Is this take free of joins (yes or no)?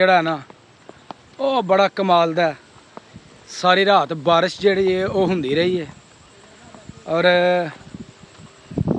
yes